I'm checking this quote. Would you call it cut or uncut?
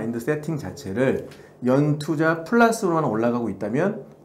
uncut